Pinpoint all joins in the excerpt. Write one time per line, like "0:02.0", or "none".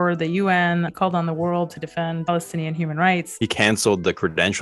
0:00.9
0:02.3
0:03.3